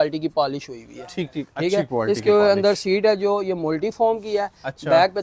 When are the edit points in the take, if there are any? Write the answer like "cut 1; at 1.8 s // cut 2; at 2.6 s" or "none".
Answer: none